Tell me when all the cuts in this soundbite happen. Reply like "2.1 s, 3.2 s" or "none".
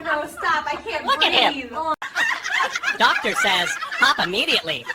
none